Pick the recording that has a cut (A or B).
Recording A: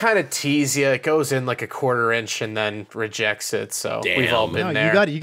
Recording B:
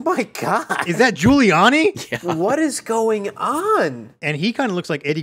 B